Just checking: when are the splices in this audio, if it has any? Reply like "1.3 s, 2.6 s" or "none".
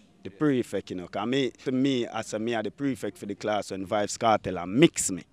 1.6 s